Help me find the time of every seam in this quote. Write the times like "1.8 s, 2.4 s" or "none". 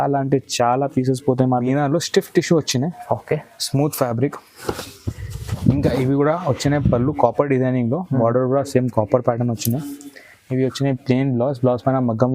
1.6 s